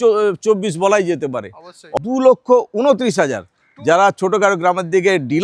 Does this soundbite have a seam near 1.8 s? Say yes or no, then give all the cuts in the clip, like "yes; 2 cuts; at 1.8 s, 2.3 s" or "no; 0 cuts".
yes; 1 cut; at 1.8 s